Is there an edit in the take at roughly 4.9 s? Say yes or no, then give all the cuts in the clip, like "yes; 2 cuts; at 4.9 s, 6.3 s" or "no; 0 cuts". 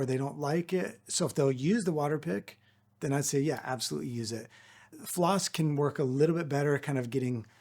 yes; 1 cut; at 4.9 s